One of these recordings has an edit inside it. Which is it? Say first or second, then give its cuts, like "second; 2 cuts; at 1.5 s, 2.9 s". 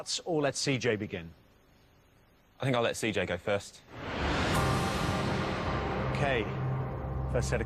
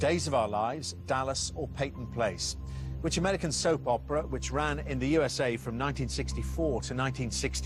first; 1 cut; at 0.9 s